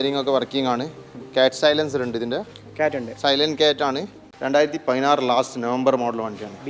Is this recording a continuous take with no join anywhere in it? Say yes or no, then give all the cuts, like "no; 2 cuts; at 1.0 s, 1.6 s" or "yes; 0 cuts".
no; 1 cut; at 4.3 s